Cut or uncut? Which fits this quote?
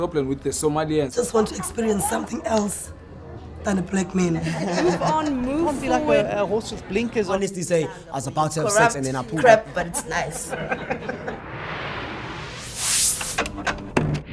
cut